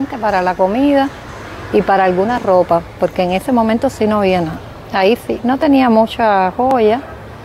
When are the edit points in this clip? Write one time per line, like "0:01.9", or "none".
none